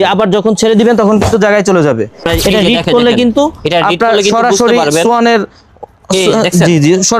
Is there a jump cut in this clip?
yes; 1 cut; at 2.3 s

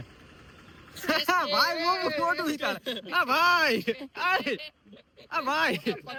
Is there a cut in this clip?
no; 0 cuts

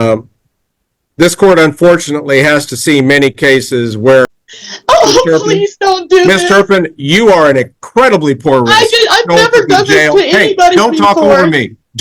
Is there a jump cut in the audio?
yes; 1 cut; at 4.2 s

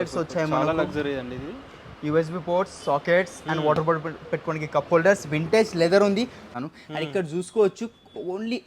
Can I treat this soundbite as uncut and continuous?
no; 1 cut; at 6.4 s

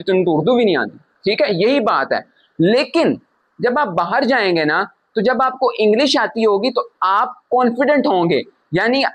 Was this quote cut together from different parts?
no; 0 cuts

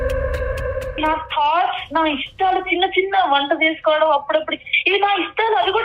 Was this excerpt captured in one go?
no; 1 cut; at 0.9 s

